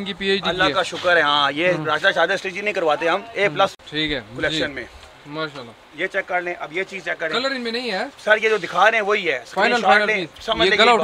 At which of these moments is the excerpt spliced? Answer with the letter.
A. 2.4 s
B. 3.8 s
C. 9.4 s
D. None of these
D